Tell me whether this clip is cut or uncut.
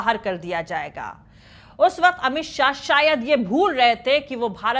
uncut